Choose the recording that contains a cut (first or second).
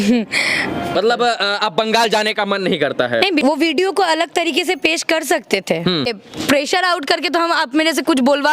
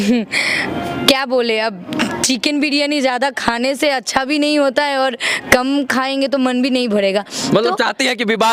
first